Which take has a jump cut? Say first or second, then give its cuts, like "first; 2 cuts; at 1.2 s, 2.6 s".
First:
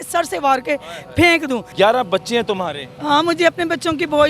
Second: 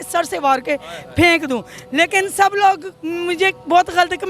first; 1 cut; at 1.7 s